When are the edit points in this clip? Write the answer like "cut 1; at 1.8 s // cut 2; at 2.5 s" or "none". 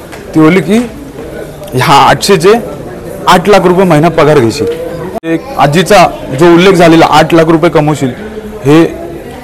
cut 1; at 5.4 s